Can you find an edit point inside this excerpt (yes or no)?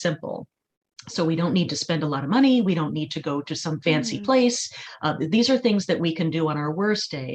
no